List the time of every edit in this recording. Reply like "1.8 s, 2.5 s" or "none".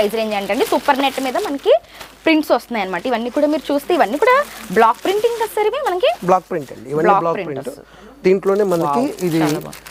none